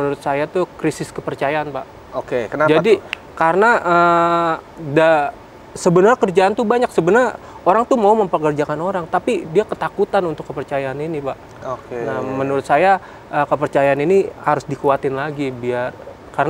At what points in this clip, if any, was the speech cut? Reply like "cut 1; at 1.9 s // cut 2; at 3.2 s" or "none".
none